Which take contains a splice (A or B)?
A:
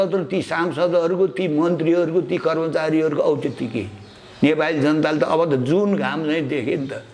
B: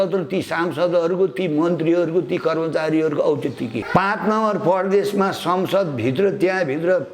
B